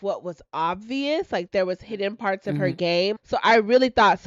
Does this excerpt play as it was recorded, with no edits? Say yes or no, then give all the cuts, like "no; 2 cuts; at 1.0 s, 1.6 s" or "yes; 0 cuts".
no; 1 cut; at 3.2 s